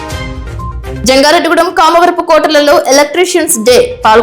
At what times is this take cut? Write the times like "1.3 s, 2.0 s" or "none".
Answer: 1.0 s